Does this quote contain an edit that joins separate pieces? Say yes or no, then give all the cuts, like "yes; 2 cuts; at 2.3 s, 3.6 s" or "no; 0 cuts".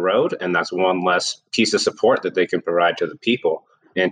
no; 0 cuts